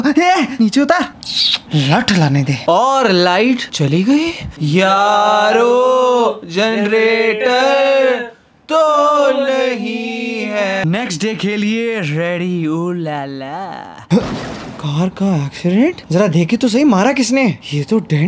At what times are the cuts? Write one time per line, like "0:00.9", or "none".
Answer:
none